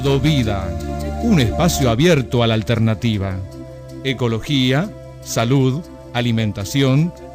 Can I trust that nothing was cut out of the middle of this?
yes; 0 cuts

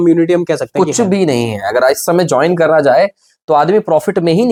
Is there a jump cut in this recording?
no; 0 cuts

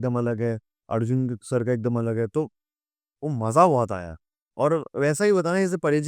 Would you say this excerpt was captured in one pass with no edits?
yes; 0 cuts

